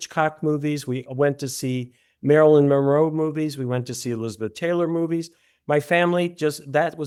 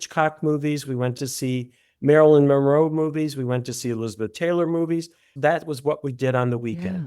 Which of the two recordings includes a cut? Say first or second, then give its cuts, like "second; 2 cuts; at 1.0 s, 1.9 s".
second; 2 cuts; at 1.1 s, 5.3 s